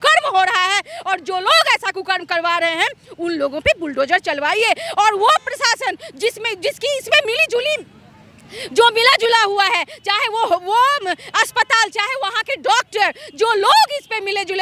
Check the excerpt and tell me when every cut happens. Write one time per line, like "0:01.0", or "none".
none